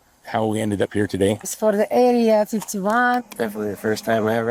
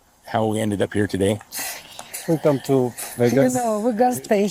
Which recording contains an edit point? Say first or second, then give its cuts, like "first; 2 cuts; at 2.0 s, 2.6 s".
first; 2 cuts; at 1.5 s, 3.2 s